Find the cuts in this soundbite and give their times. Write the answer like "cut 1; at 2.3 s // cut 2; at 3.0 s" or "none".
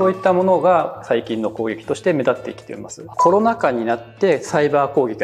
cut 1; at 3.1 s